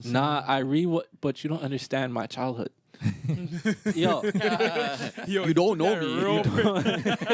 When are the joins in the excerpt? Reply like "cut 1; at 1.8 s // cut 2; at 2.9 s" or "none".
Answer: none